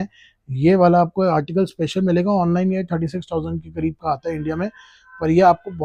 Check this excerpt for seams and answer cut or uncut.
uncut